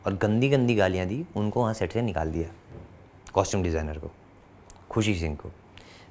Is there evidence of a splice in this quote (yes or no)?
no